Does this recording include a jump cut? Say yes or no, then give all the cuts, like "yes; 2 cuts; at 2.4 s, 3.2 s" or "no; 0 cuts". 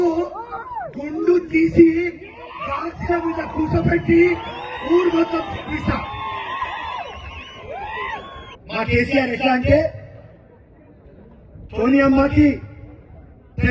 yes; 1 cut; at 8.5 s